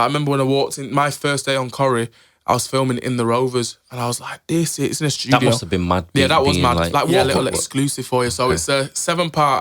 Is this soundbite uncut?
no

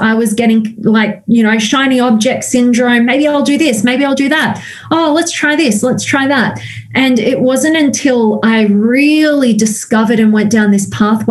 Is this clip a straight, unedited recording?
yes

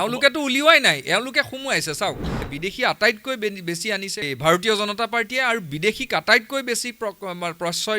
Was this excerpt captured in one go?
no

